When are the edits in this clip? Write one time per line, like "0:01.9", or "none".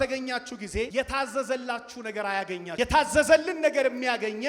0:00.9
0:02.7